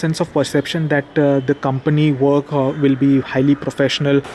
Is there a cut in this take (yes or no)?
no